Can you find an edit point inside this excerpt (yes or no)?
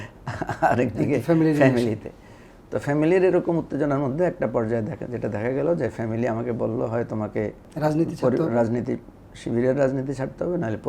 yes